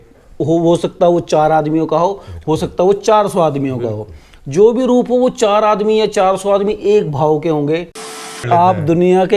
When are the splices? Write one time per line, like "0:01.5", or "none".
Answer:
0:08.4